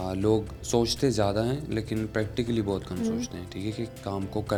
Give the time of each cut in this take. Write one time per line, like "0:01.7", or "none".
none

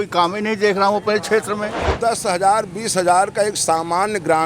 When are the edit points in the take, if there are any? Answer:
0:01.9

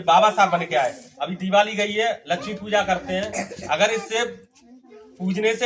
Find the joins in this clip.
0:01.1

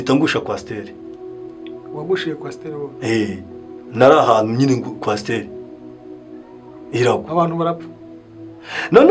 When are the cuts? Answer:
none

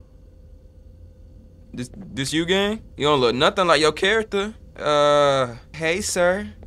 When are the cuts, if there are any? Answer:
0:02.9
0:04.6
0:05.6

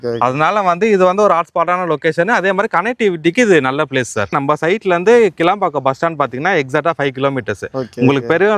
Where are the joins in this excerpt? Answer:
none

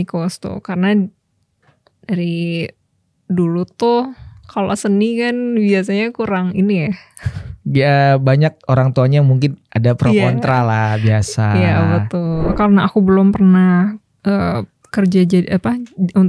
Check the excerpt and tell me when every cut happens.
0:12.5

